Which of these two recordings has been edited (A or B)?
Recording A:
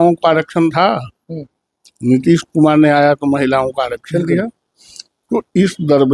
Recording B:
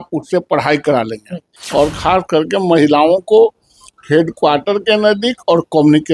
B